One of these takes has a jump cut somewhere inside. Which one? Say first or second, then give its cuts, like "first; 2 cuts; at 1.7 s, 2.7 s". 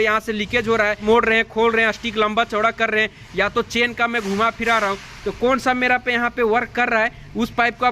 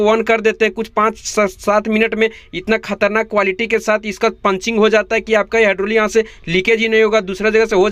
first; 1 cut; at 1.0 s